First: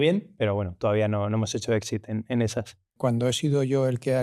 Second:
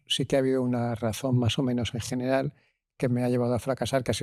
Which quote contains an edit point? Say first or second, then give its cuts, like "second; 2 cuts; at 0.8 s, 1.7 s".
first; 1 cut; at 2.9 s